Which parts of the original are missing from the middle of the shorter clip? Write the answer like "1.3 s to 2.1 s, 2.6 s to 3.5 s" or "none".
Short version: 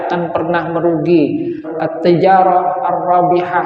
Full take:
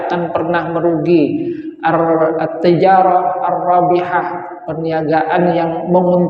1.8 s to 2.3 s